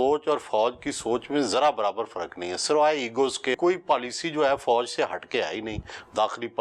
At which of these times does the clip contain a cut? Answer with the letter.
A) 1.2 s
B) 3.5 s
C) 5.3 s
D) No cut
B